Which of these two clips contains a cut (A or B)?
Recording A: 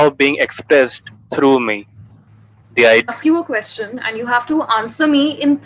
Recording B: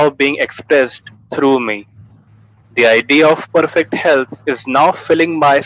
A